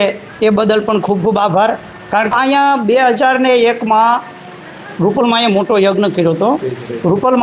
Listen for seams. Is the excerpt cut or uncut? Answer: cut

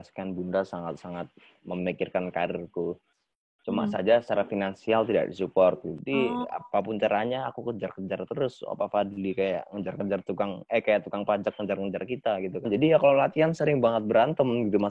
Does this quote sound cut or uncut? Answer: cut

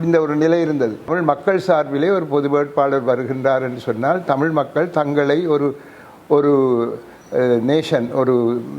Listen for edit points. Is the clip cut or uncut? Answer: cut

